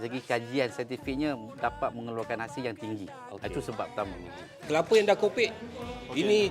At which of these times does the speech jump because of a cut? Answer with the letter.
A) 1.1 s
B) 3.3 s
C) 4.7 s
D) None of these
C